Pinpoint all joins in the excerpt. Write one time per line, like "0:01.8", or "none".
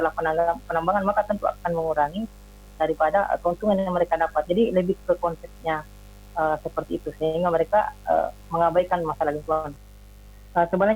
0:09.7